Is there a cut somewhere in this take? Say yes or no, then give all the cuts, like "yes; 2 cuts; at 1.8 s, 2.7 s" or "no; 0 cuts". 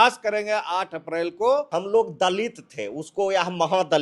yes; 1 cut; at 1.7 s